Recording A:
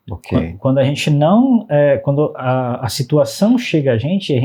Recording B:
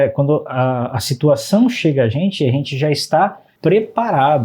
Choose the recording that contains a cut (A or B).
B